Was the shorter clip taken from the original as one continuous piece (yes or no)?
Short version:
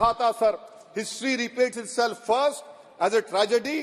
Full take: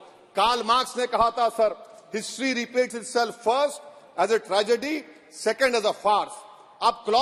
yes